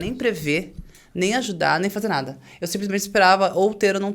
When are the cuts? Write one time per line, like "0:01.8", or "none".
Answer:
none